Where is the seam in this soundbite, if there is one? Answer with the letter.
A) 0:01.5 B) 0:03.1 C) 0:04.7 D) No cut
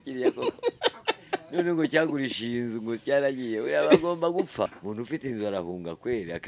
C